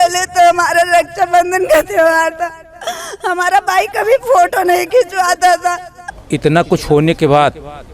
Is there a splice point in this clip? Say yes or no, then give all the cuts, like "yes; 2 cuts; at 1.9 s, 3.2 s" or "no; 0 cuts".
yes; 1 cut; at 6.0 s